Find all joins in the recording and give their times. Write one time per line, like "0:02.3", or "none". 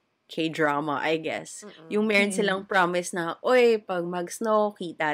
none

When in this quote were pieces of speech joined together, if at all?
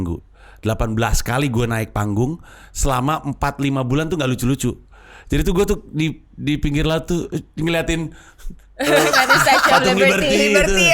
none

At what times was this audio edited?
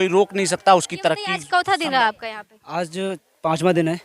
0:01.3

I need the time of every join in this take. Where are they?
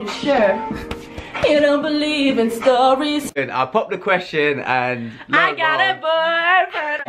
0:03.3

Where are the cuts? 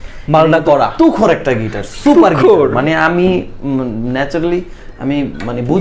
none

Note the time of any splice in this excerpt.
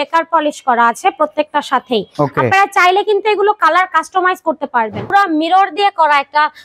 0:02.1
0:05.1

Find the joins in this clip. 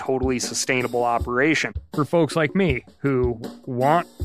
0:01.8

